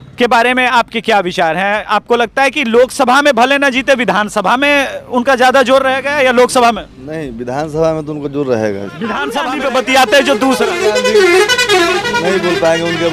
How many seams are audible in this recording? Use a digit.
1